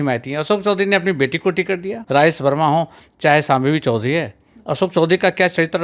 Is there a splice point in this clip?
yes; 1 cut; at 1.9 s

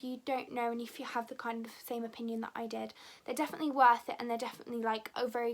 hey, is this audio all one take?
yes; 0 cuts

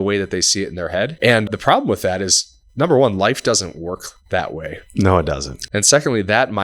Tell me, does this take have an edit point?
yes; 2 cuts; at 1.1 s, 5.5 s

